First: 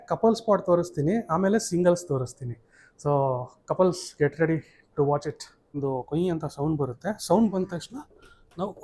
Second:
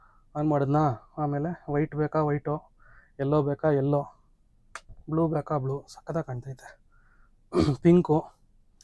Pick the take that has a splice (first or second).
first